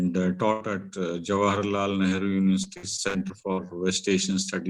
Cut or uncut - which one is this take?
uncut